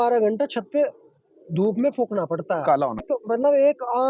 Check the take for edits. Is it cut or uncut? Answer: cut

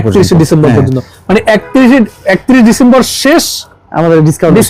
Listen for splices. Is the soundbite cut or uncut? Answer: uncut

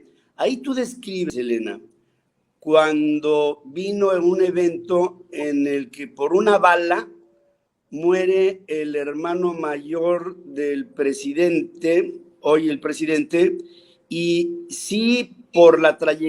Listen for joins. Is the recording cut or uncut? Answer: cut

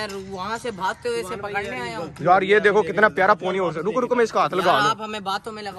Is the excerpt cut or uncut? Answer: uncut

